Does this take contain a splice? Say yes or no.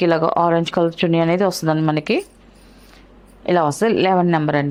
no